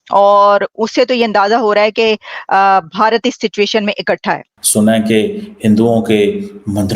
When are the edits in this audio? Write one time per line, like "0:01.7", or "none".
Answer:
0:04.5